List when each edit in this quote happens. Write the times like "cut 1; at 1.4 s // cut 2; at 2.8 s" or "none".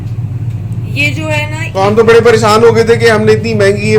cut 1; at 1.6 s